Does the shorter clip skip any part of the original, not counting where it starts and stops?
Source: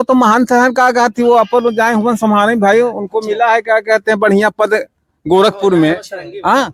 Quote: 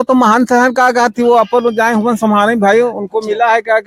no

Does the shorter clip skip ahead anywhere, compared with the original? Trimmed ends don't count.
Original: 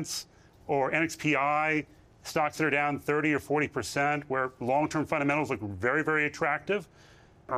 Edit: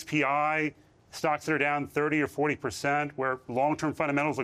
no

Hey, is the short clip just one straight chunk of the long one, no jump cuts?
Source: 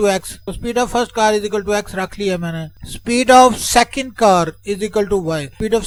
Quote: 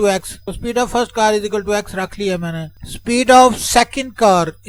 yes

